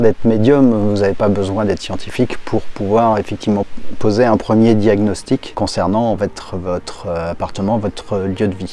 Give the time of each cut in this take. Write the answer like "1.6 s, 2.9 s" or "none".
3.7 s, 5.5 s